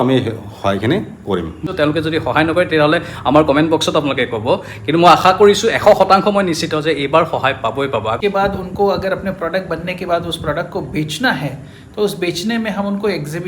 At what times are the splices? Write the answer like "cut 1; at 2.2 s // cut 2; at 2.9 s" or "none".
cut 1; at 1.6 s // cut 2; at 8.2 s